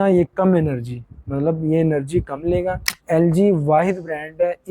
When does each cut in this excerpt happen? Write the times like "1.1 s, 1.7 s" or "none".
2.9 s